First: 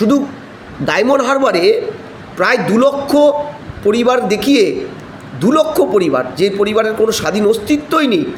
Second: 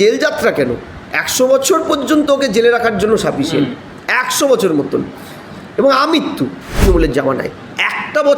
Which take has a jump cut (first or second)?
second